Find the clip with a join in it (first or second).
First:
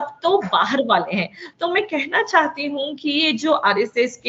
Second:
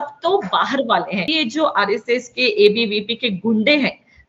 second